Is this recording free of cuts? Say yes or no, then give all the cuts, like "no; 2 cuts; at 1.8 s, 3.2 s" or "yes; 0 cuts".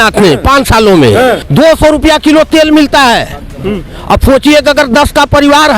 no; 1 cut; at 1.4 s